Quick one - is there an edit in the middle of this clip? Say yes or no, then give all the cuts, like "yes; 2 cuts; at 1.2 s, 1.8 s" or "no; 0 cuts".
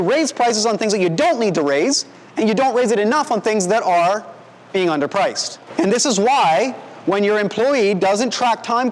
yes; 1 cut; at 5.6 s